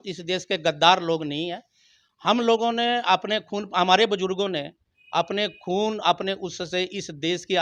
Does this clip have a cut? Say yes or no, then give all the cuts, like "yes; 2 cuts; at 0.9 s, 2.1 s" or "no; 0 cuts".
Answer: no; 0 cuts